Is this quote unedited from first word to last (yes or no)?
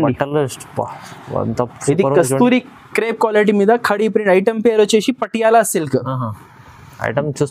yes